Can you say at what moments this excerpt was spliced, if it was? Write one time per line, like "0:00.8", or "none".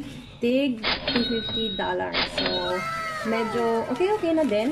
none